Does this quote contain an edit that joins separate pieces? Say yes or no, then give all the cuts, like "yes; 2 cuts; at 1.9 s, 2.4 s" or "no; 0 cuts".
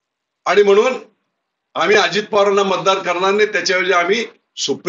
no; 0 cuts